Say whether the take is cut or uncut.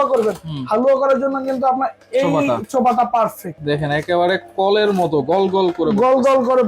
cut